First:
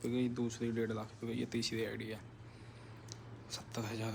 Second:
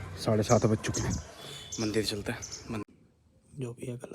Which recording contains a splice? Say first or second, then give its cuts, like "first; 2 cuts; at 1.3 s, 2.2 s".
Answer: second; 1 cut; at 2.8 s